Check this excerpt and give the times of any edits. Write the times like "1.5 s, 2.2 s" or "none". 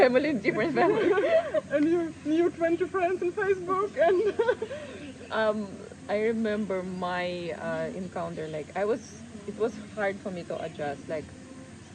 none